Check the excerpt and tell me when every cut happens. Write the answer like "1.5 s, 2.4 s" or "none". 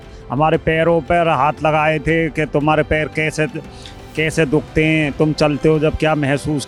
none